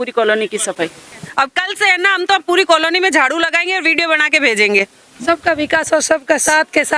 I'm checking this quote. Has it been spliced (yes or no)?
yes